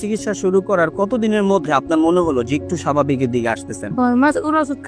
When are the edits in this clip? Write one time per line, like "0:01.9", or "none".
0:03.9

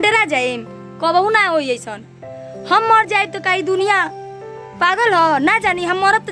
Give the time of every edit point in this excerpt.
none

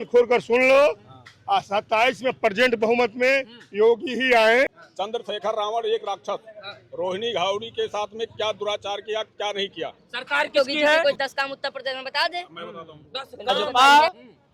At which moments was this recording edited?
0:04.8
0:11.0
0:13.6

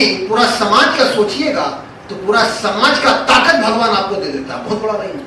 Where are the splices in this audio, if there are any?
none

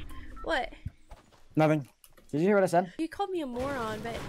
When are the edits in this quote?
0:02.9

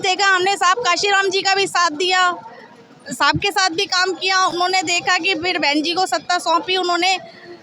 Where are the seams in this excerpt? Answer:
none

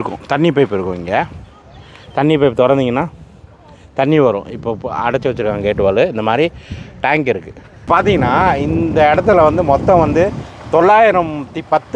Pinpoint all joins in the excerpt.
0:07.7

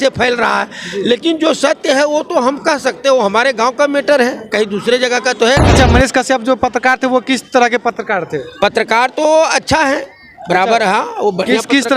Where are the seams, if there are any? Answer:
0:05.7

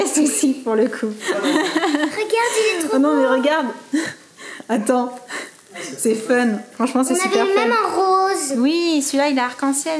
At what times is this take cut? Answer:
0:01.2

